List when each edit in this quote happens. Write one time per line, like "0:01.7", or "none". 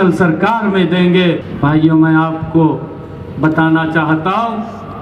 0:01.5